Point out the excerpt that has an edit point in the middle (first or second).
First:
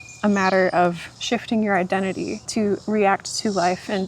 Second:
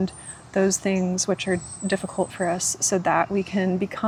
first